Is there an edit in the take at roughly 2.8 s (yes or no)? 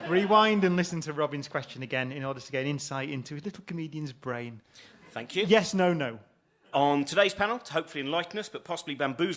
yes